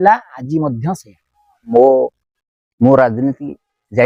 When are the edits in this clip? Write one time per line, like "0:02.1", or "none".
0:01.6